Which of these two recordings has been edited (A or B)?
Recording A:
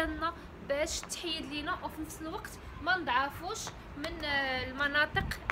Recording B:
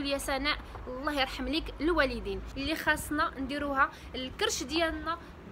B